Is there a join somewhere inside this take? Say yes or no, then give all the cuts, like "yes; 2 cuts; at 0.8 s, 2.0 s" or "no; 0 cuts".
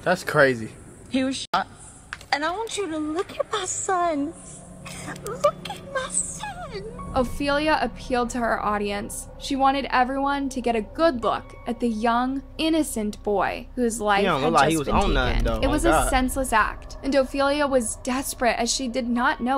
no; 0 cuts